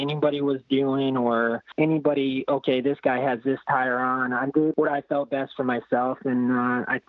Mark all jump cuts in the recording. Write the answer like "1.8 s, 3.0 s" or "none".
1.7 s, 4.7 s